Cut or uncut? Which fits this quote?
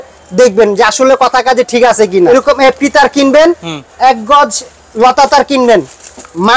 cut